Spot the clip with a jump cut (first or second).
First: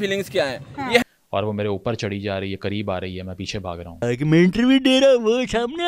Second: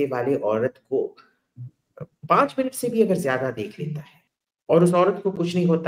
first